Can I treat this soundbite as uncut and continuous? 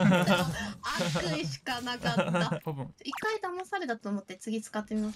no; 1 cut; at 2.6 s

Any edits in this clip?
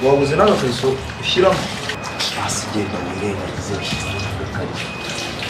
yes; 1 cut; at 2.0 s

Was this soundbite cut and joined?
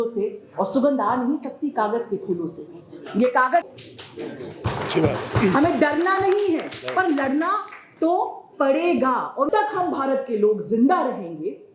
yes; 2 cuts; at 3.7 s, 9.5 s

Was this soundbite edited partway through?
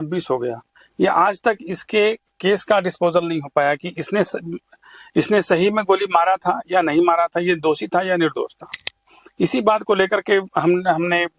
no; 0 cuts

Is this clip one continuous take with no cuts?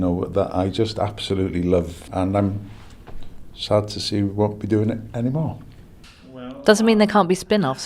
no; 1 cut; at 2.0 s

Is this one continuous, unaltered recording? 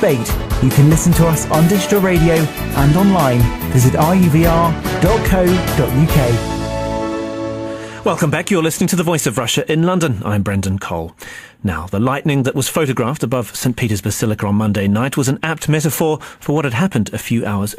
yes; 0 cuts

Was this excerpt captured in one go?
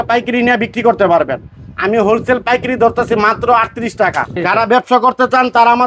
no; 1 cut; at 4.4 s

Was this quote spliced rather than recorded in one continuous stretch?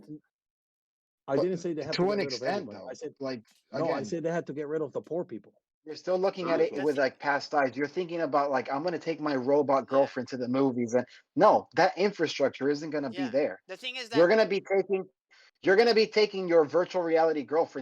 yes; 1 cut; at 6.0 s

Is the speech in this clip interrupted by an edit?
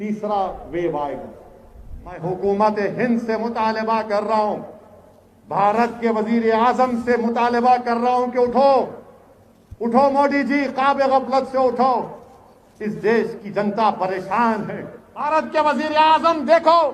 yes; 2 cuts; at 2.2 s, 15.3 s

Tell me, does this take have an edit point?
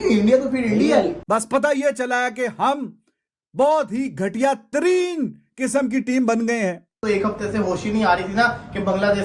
yes; 2 cuts; at 1.2 s, 7.0 s

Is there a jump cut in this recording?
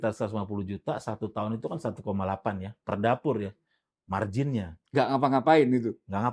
no; 0 cuts

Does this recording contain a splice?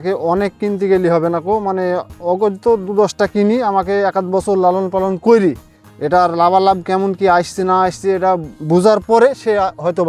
no; 0 cuts

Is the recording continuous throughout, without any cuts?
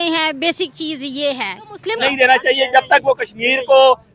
no; 1 cut; at 2.0 s

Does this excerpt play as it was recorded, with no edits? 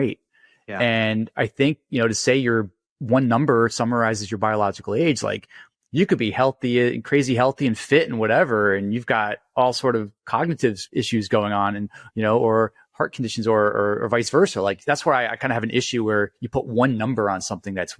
no; 1 cut; at 14.8 s

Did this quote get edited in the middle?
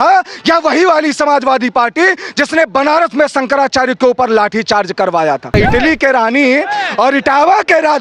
yes; 1 cut; at 5.5 s

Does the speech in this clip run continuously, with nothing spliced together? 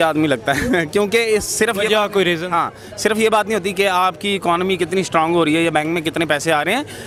yes; 0 cuts

